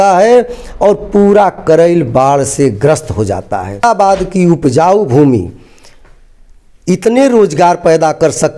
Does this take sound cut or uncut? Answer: cut